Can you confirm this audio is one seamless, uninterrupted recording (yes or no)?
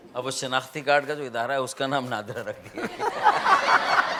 yes